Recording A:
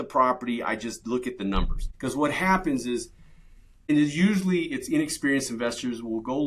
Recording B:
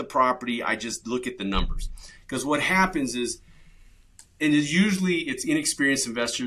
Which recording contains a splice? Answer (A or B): A